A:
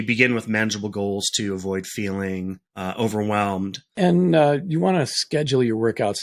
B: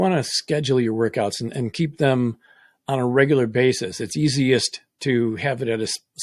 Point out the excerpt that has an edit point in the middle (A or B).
A